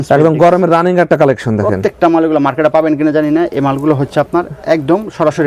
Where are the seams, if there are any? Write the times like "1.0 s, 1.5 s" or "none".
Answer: none